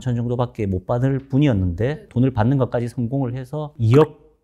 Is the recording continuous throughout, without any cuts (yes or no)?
no